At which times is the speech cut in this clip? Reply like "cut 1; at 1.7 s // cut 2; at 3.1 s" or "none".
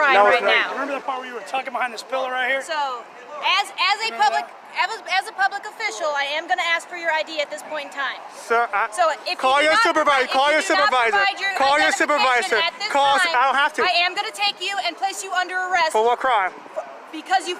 none